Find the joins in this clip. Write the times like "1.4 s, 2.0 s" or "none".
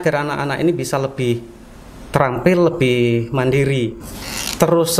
4.0 s